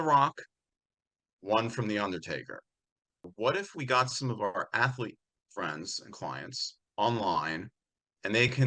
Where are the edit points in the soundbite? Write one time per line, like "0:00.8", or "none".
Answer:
0:03.3